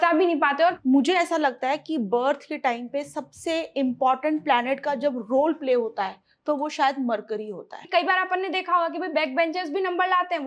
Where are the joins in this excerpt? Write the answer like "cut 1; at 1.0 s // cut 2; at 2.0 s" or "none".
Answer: cut 1; at 0.8 s // cut 2; at 7.8 s